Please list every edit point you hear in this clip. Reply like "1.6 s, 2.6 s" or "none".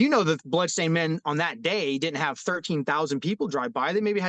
none